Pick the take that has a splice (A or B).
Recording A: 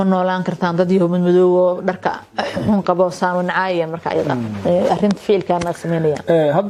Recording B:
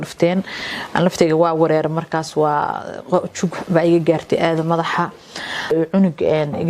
B